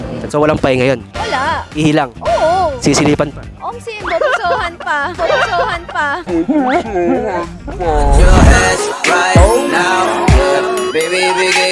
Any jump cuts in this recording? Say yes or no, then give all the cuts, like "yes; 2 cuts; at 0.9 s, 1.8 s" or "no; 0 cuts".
no; 0 cuts